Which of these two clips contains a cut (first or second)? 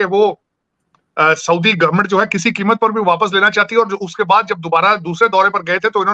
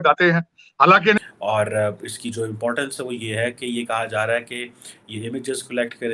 second